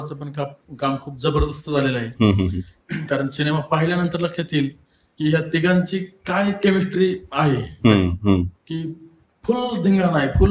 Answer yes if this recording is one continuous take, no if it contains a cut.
yes